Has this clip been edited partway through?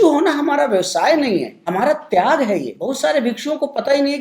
yes; 2 cuts; at 1.6 s, 2.8 s

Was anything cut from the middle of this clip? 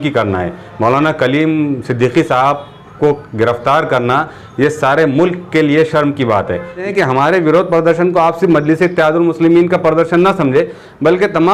yes; 1 cut; at 6.9 s

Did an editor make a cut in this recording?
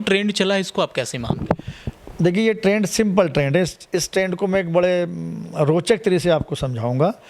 no; 0 cuts

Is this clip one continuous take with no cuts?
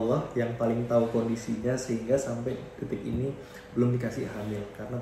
yes; 0 cuts

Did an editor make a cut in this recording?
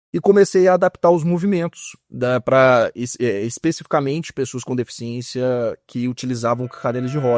no; 0 cuts

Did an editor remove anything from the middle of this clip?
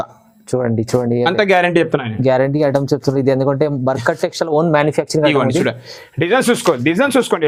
no; 0 cuts

